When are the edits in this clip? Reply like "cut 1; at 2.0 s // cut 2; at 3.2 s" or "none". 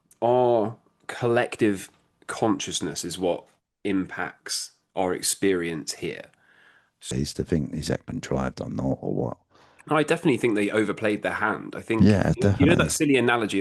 cut 1; at 7.1 s